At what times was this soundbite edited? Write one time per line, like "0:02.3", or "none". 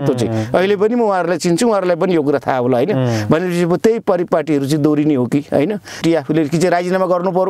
0:06.0